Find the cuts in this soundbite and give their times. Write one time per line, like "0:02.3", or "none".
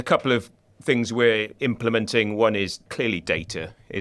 0:01.5
0:02.8